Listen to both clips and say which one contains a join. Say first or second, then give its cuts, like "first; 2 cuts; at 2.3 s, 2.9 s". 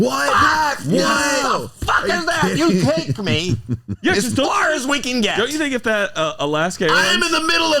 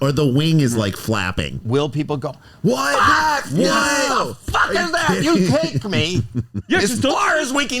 second; 1 cut; at 1.6 s